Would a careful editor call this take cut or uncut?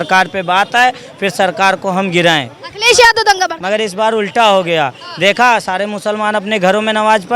uncut